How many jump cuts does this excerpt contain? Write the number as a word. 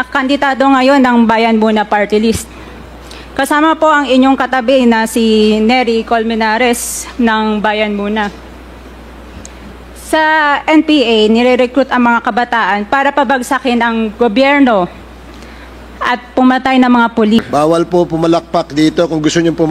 one